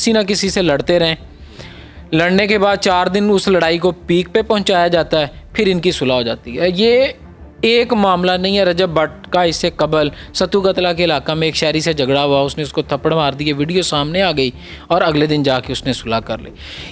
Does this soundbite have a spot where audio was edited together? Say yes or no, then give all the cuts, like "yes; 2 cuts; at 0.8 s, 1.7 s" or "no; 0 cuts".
no; 0 cuts